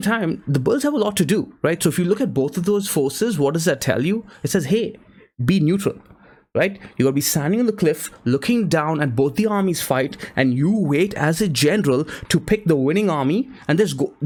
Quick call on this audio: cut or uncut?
uncut